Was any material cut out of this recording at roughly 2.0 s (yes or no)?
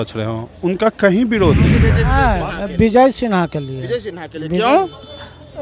yes